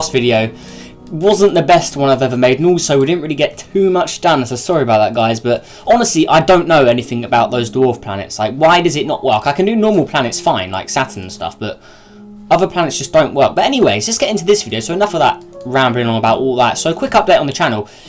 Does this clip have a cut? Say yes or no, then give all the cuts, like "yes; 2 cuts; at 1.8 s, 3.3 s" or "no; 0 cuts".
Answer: yes; 1 cut; at 5.2 s